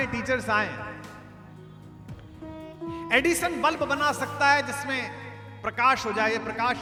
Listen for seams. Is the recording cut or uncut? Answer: uncut